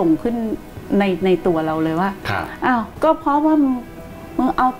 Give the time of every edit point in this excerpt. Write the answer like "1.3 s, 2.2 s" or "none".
none